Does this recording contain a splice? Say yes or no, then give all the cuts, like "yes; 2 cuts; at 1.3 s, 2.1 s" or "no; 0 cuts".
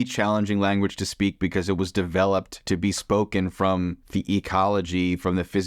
yes; 2 cuts; at 2.5 s, 4.0 s